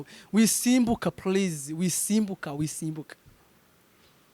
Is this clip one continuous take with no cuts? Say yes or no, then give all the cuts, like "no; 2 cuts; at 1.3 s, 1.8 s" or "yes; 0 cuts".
yes; 0 cuts